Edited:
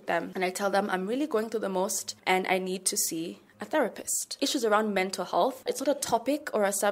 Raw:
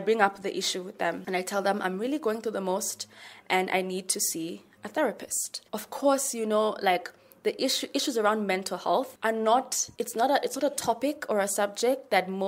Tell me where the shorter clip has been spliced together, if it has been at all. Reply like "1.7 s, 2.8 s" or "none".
2.1 s, 4.3 s, 5.7 s